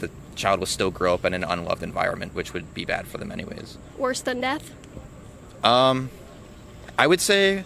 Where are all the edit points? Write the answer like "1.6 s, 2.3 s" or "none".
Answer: none